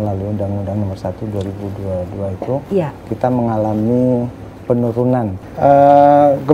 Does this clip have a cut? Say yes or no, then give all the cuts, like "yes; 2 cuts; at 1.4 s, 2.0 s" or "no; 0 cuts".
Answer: yes; 1 cut; at 5.4 s